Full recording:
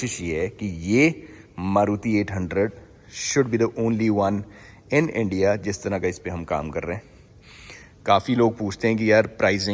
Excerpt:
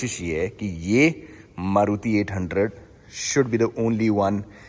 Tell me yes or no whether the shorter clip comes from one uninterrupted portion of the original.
yes